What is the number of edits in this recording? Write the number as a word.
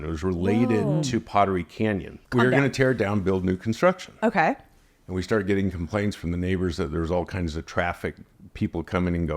one